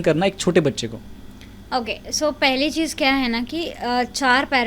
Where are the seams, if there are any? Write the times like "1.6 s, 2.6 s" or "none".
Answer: none